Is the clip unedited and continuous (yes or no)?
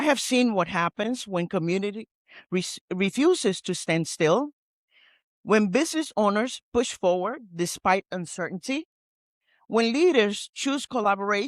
yes